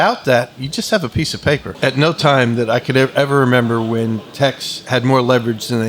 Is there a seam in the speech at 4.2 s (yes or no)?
no